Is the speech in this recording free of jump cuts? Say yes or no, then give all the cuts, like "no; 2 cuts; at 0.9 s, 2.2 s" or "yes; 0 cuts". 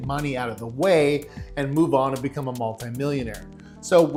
yes; 0 cuts